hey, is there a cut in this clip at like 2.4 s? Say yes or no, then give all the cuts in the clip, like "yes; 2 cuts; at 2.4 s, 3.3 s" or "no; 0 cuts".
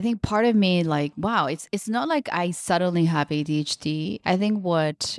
no; 1 cut; at 1.1 s